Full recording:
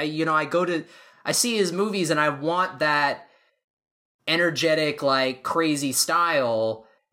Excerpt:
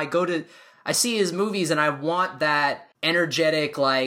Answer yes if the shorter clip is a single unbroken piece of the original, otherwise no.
no